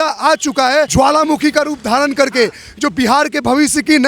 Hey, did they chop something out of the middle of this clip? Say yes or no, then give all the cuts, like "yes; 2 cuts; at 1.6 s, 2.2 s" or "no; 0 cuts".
yes; 1 cut; at 0.9 s